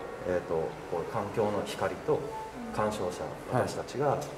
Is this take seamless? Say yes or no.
yes